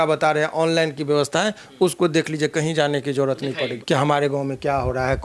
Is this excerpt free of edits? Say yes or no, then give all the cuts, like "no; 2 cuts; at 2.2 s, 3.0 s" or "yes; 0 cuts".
no; 1 cut; at 3.8 s